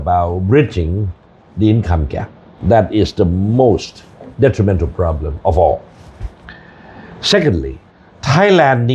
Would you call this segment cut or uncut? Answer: cut